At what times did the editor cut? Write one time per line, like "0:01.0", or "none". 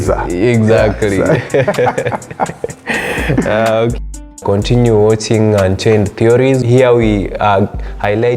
0:04.3
0:06.6